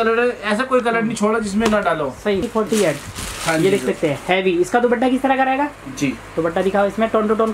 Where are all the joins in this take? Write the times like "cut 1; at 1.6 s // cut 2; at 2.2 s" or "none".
cut 1; at 2.4 s